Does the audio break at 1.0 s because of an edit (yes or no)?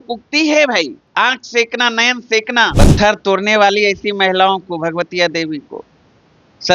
yes